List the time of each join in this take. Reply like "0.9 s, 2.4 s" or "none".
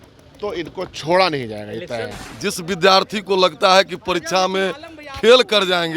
2.1 s